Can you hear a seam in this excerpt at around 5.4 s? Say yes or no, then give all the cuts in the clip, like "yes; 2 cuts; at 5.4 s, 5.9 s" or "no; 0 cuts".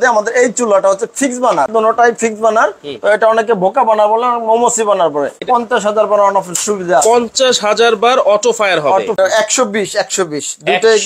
yes; 3 cuts; at 1.7 s, 5.4 s, 9.2 s